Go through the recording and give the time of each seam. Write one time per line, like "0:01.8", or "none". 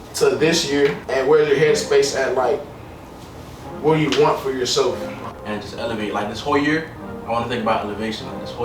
0:01.0
0:05.2